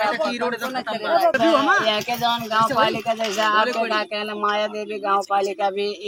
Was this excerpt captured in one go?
yes; 0 cuts

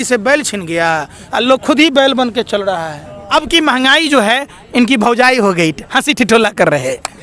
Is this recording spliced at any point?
yes; 1 cut; at 3.1 s

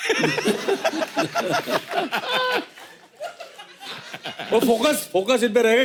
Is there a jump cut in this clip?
no; 0 cuts

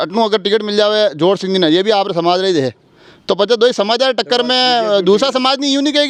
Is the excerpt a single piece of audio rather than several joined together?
yes; 0 cuts

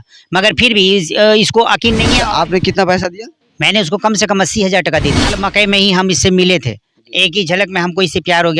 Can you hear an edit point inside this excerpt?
yes; 2 cuts; at 2.2 s, 5.4 s

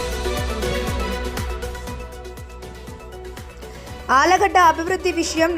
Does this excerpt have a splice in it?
yes; 3 cuts; at 1.8 s, 2.4 s, 3.5 s

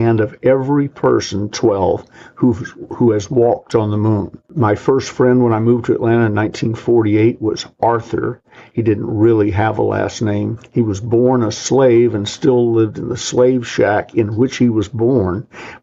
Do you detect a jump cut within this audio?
no; 0 cuts

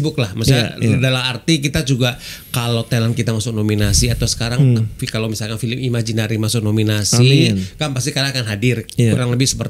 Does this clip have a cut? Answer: no; 0 cuts

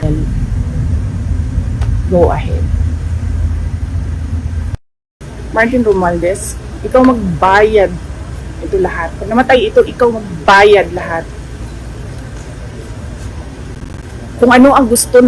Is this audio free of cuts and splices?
no; 1 cut; at 5.2 s

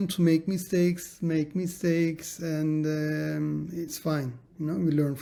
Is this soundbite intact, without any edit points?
yes; 0 cuts

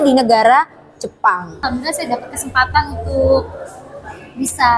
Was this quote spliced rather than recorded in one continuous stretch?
yes; 1 cut; at 1.6 s

